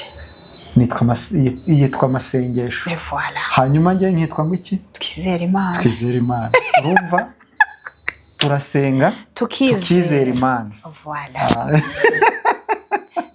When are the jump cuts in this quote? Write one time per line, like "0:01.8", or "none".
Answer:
none

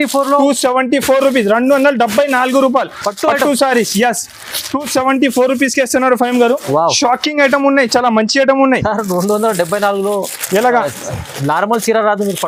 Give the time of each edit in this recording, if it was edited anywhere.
none

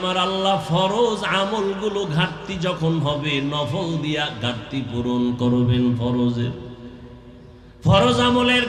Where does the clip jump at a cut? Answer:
none

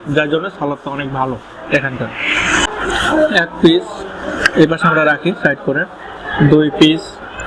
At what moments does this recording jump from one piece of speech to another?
0:02.7

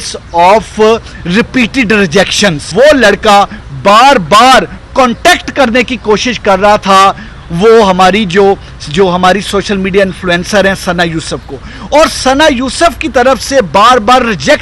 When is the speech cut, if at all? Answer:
0:02.7

